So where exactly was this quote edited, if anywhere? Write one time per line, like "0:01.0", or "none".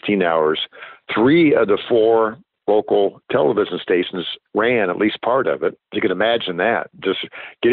0:01.0
0:05.9